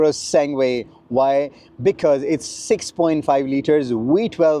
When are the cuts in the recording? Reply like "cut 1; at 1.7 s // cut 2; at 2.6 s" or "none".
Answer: none